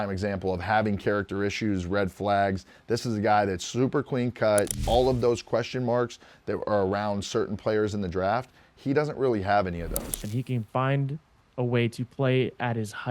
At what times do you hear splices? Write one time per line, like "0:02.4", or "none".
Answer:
0:02.7
0:04.8
0:10.2